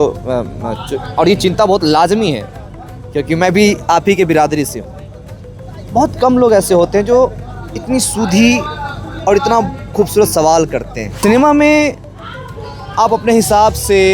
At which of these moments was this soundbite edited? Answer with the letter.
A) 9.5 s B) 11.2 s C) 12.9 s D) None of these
B